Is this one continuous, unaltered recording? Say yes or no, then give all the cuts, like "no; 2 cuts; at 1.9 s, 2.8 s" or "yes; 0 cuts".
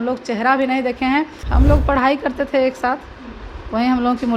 no; 1 cut; at 1.4 s